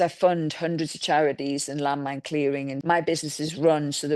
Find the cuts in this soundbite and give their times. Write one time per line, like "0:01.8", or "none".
0:02.8